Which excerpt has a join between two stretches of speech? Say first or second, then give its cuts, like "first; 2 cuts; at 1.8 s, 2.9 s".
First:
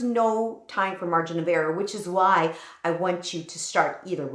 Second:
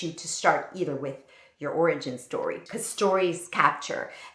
second; 1 cut; at 2.6 s